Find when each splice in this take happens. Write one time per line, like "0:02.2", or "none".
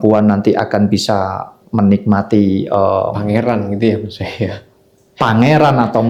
none

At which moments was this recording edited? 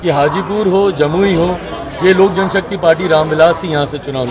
none

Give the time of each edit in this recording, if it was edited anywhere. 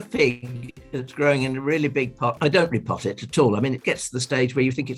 0:02.4

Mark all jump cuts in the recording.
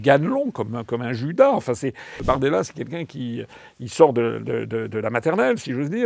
0:02.2

